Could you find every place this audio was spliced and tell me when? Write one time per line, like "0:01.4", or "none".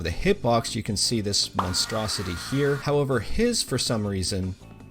0:02.8